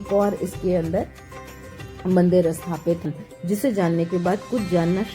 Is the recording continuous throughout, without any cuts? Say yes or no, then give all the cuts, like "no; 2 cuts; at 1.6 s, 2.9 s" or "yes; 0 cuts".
no; 1 cut; at 3.0 s